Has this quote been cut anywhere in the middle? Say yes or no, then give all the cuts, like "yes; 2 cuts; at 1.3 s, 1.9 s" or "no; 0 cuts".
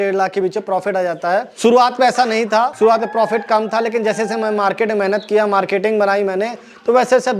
yes; 2 cuts; at 1.5 s, 2.7 s